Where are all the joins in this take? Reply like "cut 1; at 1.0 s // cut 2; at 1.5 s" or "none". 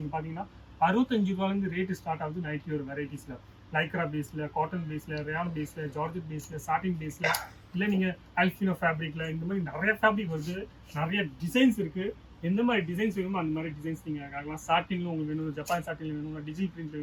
none